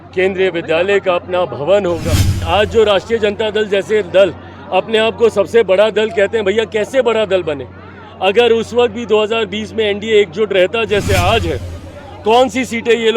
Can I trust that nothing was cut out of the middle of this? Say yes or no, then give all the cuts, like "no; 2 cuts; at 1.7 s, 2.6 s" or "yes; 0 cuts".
no; 1 cut; at 2.4 s